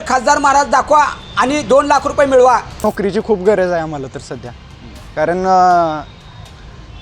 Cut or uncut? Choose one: cut